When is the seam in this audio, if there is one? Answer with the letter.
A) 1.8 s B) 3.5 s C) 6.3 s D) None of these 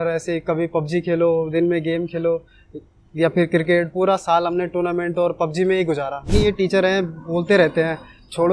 C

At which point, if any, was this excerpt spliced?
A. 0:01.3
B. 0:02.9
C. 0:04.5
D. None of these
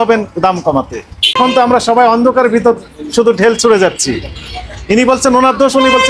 A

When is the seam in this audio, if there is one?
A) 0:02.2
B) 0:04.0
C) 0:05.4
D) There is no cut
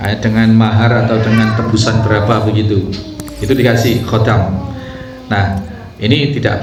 D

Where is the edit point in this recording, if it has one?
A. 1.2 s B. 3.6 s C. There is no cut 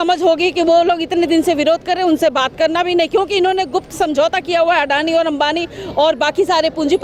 C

